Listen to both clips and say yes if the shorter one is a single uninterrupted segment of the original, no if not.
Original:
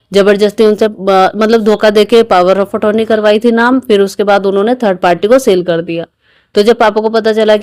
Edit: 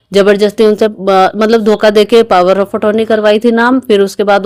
yes